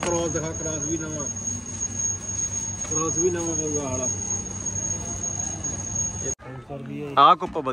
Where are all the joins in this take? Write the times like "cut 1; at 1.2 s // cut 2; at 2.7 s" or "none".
cut 1; at 6.4 s